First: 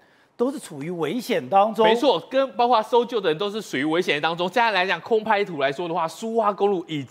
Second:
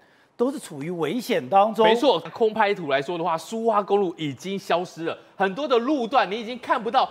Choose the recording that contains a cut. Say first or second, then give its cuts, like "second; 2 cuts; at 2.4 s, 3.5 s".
second; 1 cut; at 2.3 s